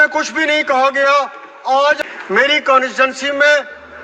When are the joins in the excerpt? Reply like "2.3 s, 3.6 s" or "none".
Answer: 2.0 s